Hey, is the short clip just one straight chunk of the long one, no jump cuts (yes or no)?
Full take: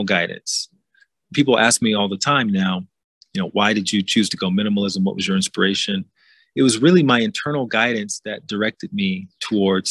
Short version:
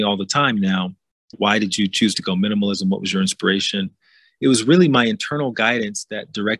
no